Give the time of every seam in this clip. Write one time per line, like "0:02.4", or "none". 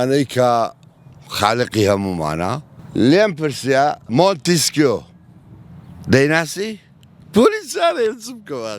0:02.7
0:04.0